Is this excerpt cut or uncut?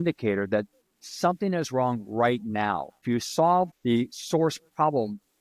cut